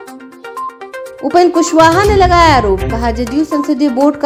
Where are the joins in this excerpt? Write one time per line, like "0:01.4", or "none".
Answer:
none